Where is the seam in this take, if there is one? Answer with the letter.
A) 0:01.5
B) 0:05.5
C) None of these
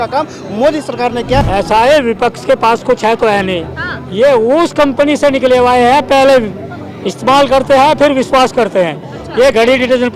A